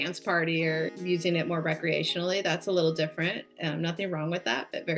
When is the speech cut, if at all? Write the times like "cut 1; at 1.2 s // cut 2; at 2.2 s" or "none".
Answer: cut 1; at 0.9 s